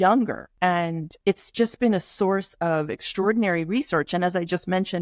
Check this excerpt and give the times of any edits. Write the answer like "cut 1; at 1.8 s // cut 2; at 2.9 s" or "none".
cut 1; at 0.9 s